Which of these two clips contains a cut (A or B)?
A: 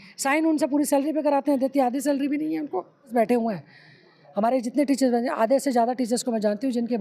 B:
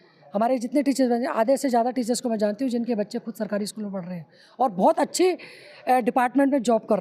A